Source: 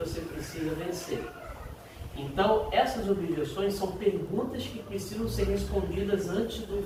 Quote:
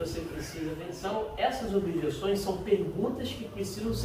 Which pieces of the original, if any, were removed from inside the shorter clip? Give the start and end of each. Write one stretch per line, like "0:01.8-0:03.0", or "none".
0:00.9-0:02.3